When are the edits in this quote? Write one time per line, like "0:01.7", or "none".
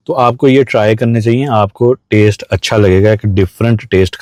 none